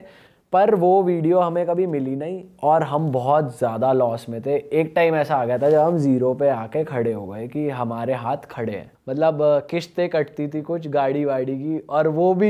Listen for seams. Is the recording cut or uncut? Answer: cut